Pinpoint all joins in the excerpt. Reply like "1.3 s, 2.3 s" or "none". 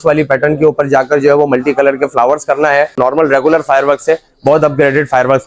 3.0 s